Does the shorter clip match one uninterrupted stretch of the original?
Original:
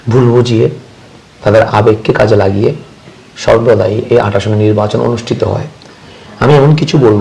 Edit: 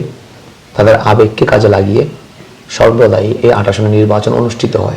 yes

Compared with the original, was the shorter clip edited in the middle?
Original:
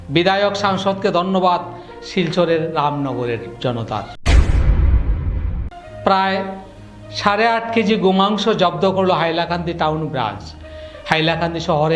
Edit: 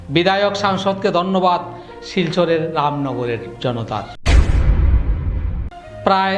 no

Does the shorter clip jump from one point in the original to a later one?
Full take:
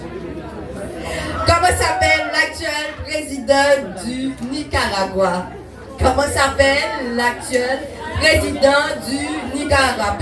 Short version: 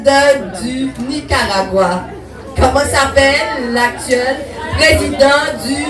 no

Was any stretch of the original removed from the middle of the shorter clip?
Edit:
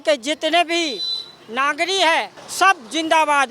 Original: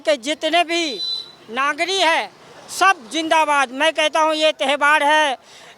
yes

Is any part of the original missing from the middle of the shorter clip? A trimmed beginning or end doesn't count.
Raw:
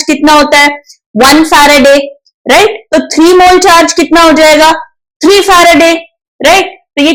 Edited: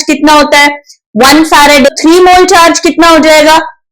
yes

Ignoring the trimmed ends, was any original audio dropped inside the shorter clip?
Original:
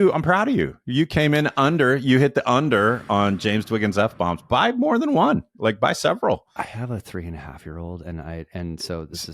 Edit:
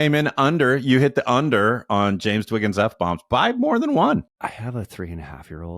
yes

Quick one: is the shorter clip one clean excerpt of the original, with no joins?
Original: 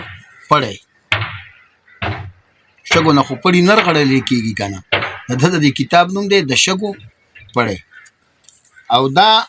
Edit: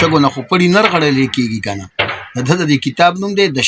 yes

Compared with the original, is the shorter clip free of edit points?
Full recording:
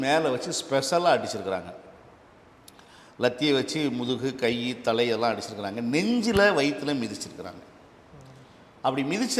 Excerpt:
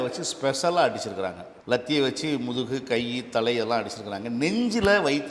no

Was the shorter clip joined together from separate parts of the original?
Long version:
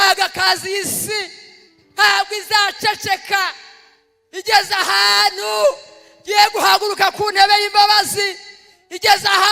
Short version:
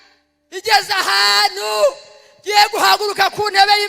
no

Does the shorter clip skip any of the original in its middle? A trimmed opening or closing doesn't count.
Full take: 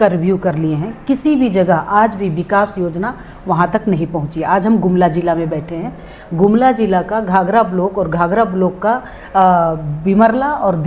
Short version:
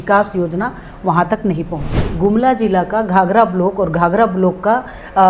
yes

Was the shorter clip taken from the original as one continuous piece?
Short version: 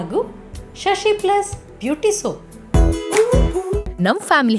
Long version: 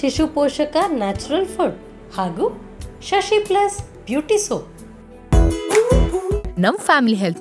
no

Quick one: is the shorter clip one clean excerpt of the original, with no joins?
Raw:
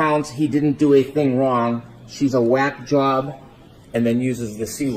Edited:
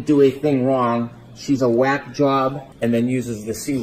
no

